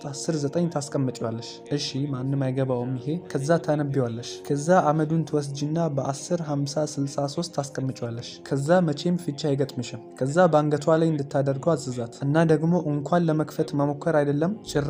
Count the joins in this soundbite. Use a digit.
0